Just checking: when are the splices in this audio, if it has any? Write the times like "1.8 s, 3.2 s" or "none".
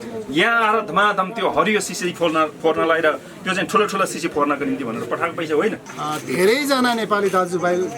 5.9 s